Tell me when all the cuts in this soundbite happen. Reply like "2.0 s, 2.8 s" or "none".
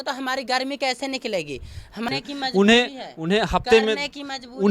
2.1 s